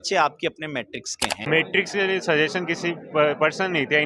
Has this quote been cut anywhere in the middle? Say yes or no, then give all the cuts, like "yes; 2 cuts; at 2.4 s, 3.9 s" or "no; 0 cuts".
yes; 1 cut; at 1.4 s